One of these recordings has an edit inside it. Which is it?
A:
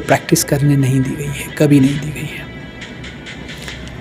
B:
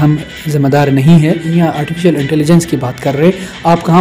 B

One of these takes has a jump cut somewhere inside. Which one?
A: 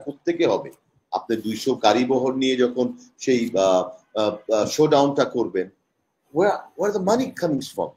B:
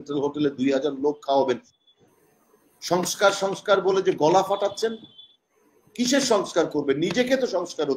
B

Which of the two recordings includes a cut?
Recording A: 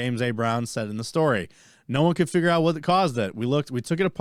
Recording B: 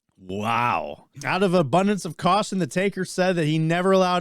B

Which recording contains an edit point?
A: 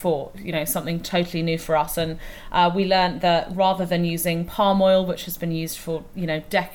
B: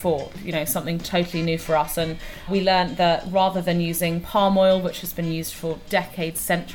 B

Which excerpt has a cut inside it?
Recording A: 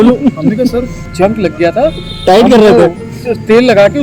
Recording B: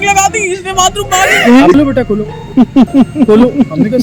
B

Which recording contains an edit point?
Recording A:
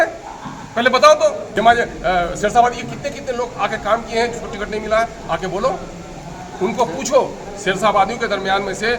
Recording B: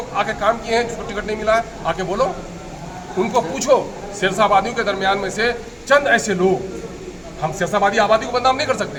A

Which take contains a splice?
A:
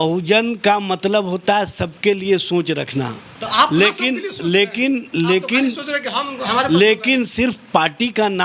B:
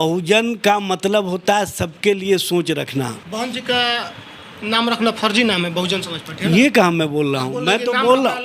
B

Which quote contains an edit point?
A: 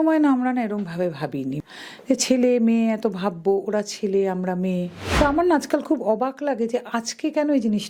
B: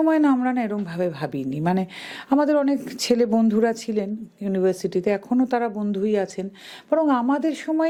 A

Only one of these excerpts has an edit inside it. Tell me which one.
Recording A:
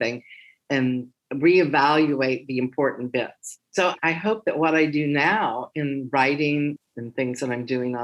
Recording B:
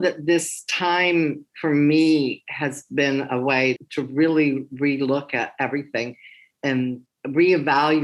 A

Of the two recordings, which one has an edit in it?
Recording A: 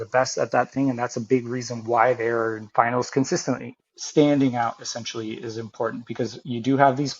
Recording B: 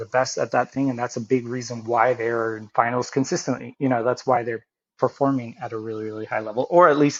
A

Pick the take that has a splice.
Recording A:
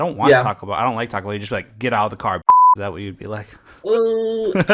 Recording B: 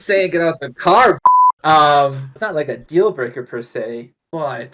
B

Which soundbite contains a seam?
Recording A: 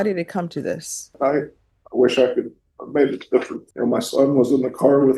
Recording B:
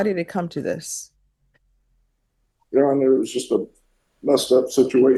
A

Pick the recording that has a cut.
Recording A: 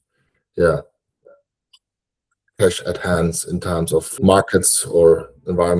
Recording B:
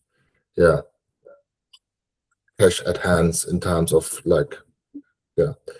A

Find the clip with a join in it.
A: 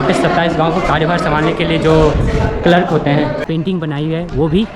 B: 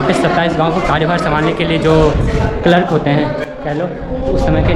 A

